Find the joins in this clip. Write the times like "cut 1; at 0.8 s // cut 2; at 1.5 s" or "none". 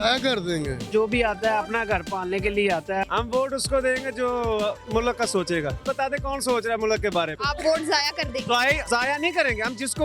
cut 1; at 0.8 s // cut 2; at 3.0 s // cut 3; at 5.8 s // cut 4; at 7.4 s